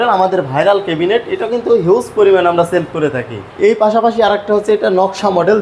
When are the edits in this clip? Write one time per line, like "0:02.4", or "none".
0:03.4